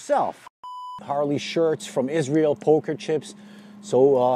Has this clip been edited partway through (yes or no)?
yes